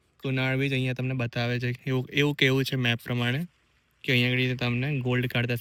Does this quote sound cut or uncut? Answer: uncut